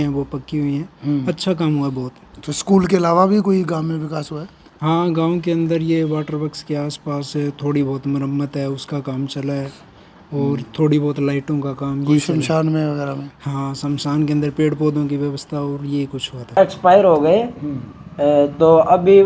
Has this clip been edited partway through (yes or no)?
no